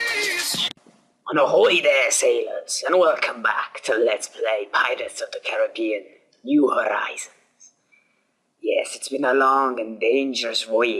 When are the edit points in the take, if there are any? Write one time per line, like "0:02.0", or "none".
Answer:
none

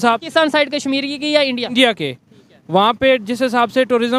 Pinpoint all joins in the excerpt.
none

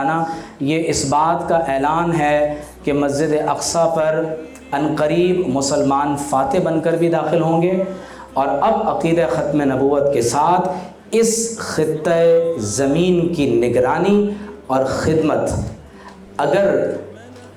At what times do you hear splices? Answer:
none

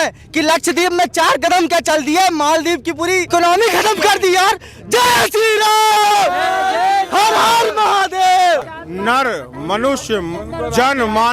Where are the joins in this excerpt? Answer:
0:08.7

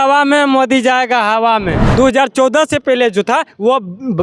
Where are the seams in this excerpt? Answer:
0:01.8

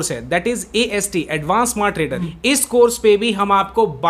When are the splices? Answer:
0:02.2

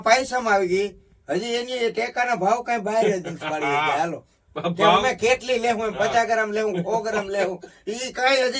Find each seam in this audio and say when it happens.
none

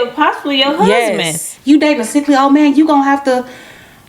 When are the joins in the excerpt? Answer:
0:01.5

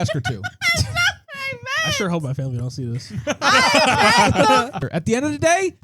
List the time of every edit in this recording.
0:04.8

